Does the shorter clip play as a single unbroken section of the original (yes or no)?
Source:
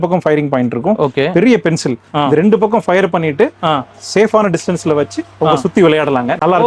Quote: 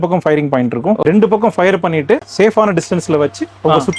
no